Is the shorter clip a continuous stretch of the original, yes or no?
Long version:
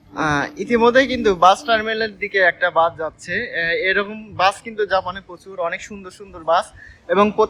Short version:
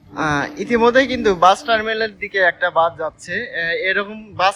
yes